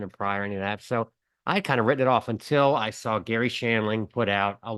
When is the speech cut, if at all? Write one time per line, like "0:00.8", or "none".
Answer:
none